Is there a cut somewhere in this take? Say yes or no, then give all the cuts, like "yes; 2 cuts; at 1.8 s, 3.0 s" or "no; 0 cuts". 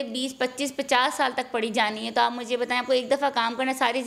no; 0 cuts